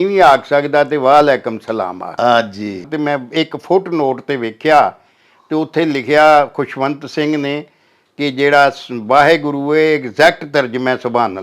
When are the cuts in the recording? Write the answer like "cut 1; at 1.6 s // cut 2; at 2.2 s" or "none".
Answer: cut 1; at 2.9 s